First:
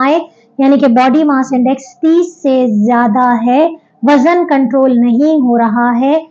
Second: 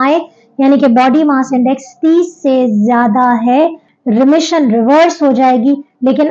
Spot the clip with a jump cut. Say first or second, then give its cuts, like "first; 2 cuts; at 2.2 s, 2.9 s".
second; 1 cut; at 3.9 s